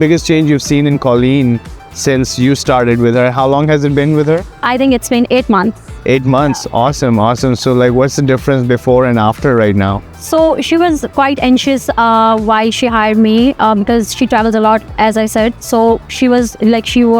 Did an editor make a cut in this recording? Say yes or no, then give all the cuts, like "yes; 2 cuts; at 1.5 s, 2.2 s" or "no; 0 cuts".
no; 0 cuts